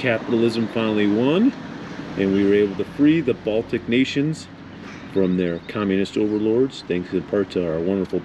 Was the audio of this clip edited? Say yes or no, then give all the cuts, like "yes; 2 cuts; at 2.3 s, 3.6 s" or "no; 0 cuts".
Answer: no; 0 cuts